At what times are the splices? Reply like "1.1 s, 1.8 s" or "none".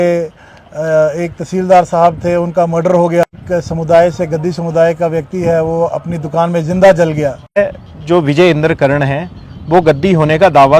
3.2 s, 7.6 s